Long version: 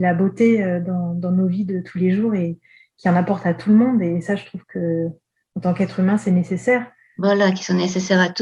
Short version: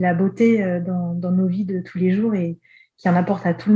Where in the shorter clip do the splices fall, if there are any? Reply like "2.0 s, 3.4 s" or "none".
none